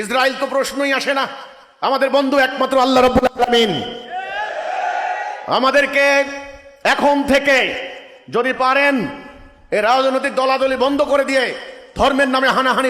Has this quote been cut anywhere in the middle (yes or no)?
no